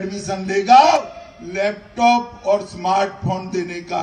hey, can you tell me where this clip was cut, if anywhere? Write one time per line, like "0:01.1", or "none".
0:00.9